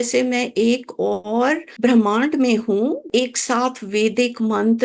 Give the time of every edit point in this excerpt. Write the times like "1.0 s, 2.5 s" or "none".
1.7 s, 3.1 s